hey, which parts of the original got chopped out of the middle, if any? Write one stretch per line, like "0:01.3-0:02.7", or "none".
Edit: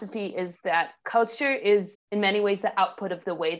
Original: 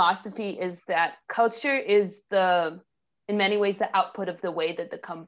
0:02.2-0:03.1